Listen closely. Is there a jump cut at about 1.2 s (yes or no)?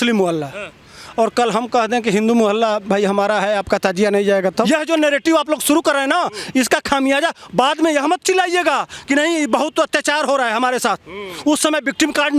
no